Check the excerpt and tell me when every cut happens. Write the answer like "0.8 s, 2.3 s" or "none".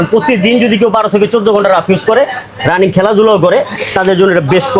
none